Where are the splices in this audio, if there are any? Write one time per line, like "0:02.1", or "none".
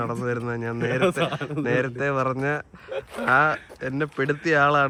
none